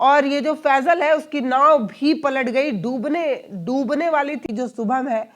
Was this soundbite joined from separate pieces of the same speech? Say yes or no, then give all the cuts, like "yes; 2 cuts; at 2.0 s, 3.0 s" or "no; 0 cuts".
yes; 1 cut; at 4.4 s